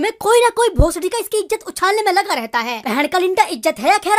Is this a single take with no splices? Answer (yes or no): no